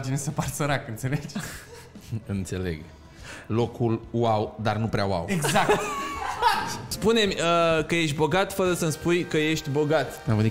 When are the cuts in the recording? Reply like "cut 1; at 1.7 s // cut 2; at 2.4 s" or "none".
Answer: cut 1; at 6.9 s